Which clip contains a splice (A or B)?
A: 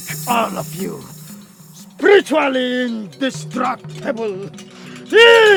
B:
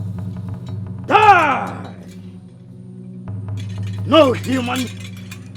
B